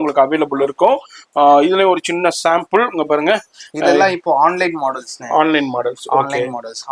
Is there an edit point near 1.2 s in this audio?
no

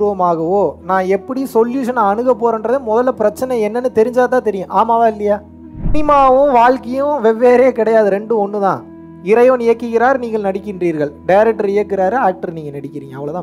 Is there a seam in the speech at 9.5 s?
no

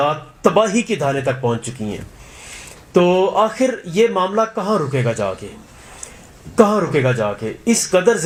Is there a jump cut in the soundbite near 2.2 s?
no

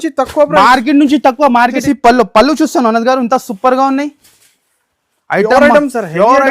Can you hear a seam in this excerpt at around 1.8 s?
yes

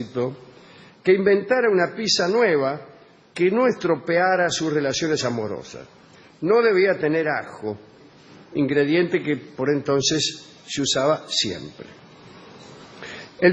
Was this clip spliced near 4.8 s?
no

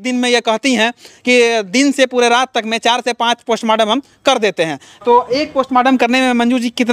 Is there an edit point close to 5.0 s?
yes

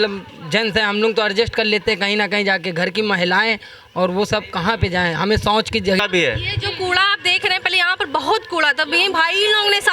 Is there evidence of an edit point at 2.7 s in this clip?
no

